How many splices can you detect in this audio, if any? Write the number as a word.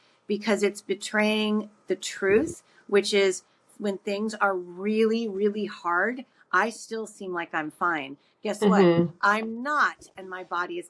zero